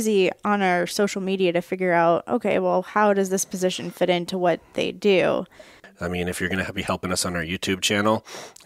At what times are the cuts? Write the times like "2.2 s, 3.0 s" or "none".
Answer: 6.0 s